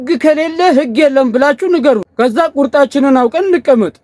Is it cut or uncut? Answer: cut